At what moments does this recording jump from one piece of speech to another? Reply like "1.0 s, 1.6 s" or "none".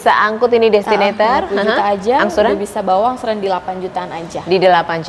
none